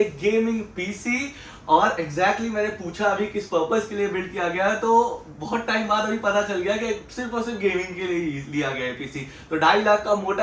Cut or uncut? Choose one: uncut